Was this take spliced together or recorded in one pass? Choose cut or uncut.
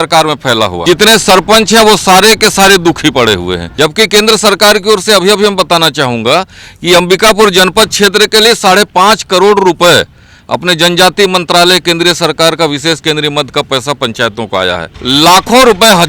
cut